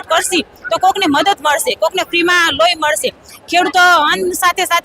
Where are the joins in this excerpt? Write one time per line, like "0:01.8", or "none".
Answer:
none

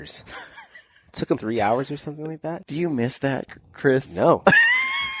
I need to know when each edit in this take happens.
0:01.4
0:02.6

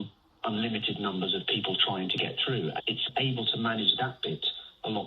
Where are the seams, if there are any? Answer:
0:03.0

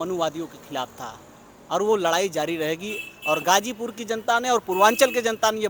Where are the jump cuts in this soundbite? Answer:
none

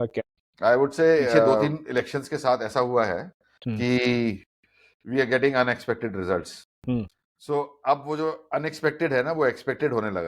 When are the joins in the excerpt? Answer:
0:01.5

